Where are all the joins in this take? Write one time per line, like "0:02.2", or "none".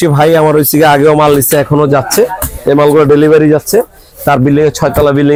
none